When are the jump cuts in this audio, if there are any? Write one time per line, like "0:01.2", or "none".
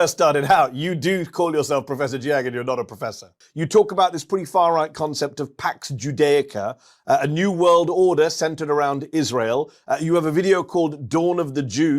0:03.4